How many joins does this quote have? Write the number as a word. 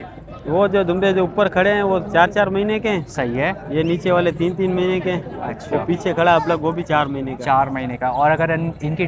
zero